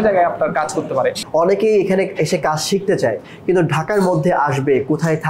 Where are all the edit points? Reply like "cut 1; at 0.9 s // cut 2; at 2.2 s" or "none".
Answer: cut 1; at 1.2 s